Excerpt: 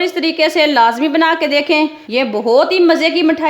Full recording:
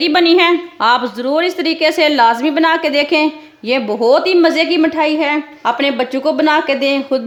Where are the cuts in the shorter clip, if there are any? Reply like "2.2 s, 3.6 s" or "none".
2.0 s